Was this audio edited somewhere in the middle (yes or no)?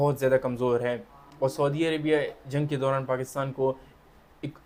no